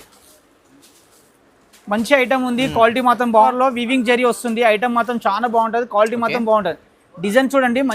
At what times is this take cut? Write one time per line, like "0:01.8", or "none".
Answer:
0:03.5